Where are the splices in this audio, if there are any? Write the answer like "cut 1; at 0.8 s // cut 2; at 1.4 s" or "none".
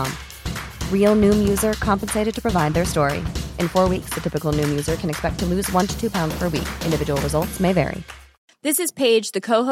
none